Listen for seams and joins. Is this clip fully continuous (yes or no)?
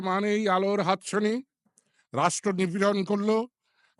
yes